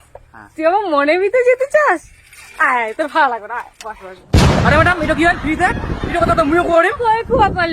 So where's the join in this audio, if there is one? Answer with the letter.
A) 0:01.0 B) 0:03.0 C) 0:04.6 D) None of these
C